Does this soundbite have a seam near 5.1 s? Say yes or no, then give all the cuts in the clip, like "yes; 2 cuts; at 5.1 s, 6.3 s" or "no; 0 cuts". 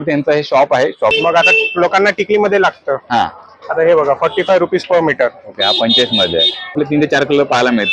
no; 2 cuts; at 1.2 s, 6.7 s